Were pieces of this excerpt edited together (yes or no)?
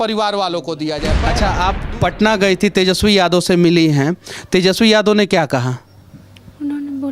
yes